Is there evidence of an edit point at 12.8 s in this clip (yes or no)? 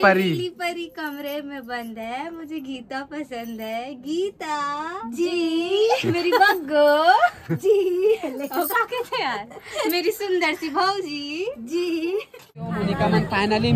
yes